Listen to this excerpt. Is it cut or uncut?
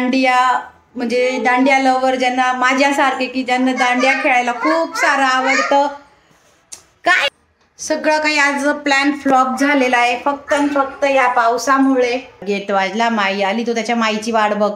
cut